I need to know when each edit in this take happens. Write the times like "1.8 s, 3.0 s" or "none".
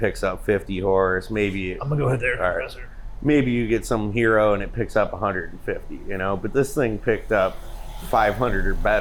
none